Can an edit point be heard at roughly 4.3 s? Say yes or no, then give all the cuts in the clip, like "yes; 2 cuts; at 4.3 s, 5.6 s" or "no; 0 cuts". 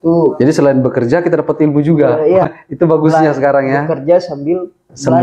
no; 1 cut; at 2.5 s